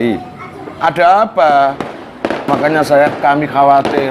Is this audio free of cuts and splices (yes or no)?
no